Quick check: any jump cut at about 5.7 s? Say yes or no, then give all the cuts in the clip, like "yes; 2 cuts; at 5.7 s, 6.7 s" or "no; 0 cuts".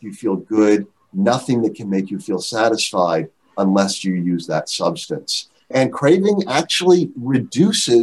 yes; 1 cut; at 5.7 s